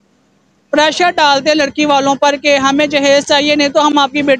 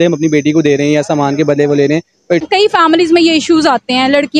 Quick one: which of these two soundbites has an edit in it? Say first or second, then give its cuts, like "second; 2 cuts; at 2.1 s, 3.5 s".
second; 1 cut; at 2.4 s